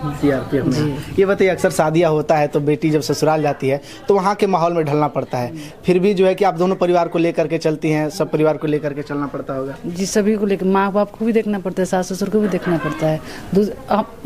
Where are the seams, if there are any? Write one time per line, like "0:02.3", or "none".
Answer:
none